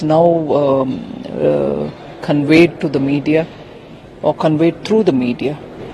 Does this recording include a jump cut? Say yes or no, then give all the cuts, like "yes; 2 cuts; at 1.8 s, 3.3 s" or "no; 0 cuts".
no; 0 cuts